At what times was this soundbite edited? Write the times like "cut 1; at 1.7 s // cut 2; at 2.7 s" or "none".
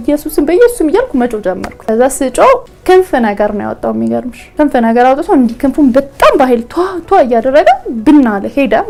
none